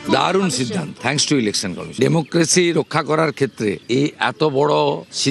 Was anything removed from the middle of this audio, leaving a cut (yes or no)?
yes